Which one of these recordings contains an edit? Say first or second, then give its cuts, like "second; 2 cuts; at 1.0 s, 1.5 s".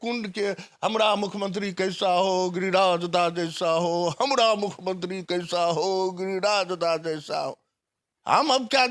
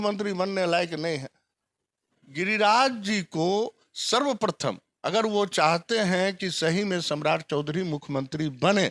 second; 1 cut; at 2.2 s